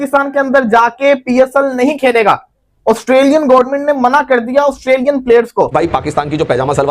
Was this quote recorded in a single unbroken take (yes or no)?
no